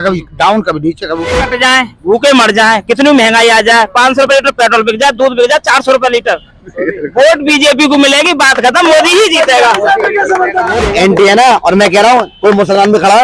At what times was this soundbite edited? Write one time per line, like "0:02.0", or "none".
0:01.3
0:10.8